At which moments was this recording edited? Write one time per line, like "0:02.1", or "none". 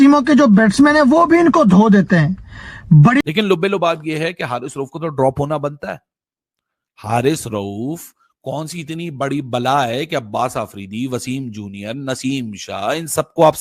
0:03.2